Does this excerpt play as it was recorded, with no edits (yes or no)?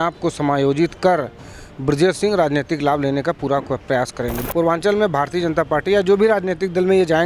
no